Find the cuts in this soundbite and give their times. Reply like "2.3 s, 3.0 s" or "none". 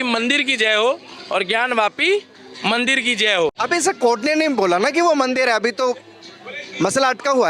3.5 s